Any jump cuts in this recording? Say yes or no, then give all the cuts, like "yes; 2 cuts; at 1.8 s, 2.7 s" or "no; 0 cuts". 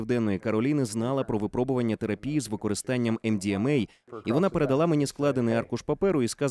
yes; 1 cut; at 4.0 s